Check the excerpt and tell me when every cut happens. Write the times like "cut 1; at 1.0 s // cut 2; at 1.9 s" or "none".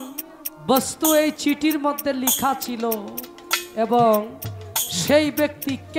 none